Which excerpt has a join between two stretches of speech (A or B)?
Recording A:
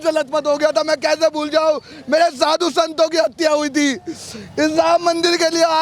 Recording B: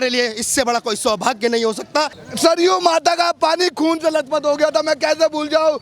B